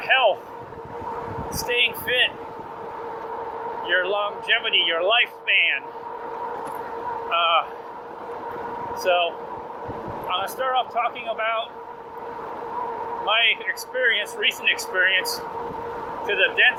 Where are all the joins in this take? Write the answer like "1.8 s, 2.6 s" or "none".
none